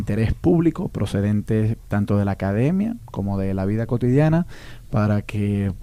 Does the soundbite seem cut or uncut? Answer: uncut